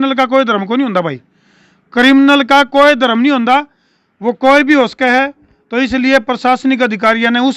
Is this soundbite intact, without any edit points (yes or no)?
yes